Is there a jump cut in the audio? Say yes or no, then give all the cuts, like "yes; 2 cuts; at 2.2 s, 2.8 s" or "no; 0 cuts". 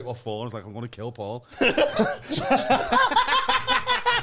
no; 0 cuts